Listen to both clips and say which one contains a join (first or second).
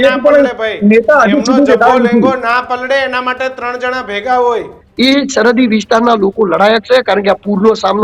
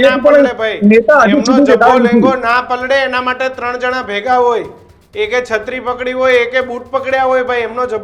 first